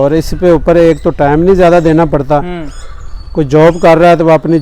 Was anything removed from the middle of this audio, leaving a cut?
no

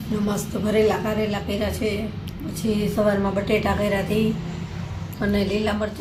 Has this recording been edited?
no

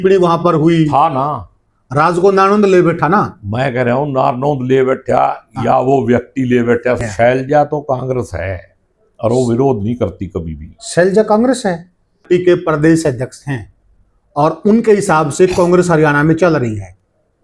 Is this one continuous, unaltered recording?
no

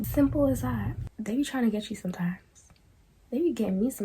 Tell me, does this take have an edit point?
yes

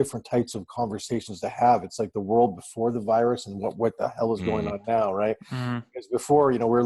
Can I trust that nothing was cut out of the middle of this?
yes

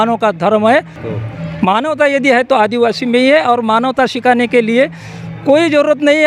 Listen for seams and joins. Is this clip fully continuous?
no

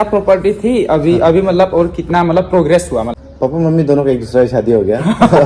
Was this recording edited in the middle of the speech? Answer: yes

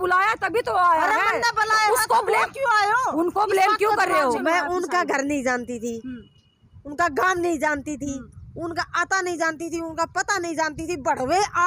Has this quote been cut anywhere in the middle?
yes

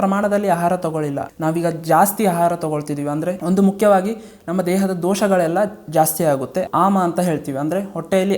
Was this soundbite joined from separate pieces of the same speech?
yes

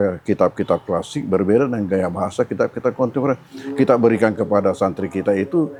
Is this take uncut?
yes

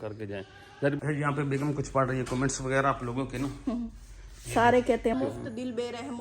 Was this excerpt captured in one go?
no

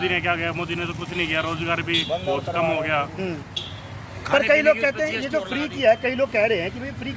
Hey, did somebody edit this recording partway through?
no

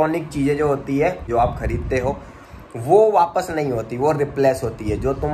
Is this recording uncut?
no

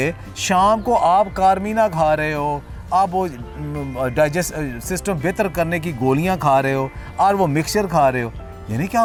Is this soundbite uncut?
yes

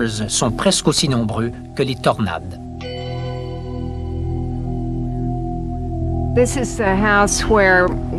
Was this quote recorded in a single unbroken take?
no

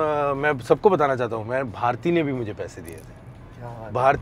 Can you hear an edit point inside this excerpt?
no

